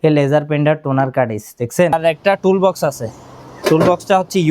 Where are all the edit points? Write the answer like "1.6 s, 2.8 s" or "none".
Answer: 1.9 s